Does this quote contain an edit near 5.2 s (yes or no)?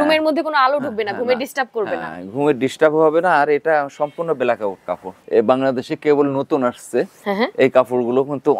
yes